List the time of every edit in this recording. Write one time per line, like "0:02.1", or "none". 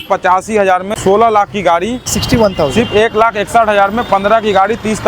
0:00.9
0:02.2